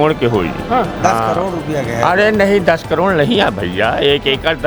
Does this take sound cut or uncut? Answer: uncut